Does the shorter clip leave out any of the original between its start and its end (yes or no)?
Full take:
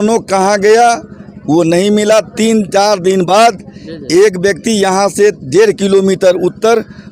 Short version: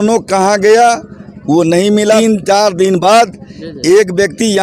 yes